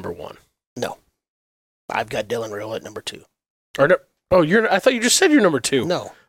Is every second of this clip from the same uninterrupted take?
yes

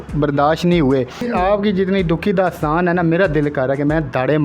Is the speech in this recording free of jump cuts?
no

